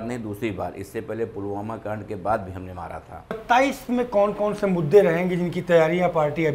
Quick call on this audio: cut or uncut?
cut